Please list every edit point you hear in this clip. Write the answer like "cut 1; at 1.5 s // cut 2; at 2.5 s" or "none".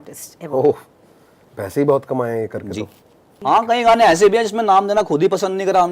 cut 1; at 3.3 s

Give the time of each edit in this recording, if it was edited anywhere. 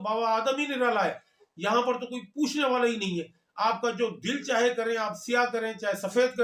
none

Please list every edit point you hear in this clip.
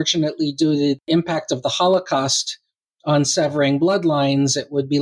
cut 1; at 1.1 s

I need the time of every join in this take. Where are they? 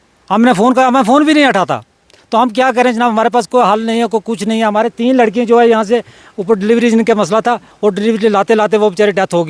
none

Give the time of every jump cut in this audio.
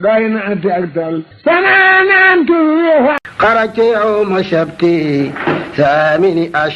cut 1; at 3.3 s

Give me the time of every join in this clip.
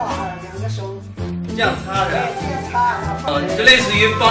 cut 1; at 1.6 s

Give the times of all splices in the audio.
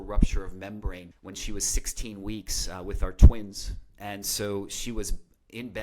cut 1; at 1.1 s

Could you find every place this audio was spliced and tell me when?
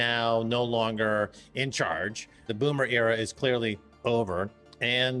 cut 1; at 2.5 s

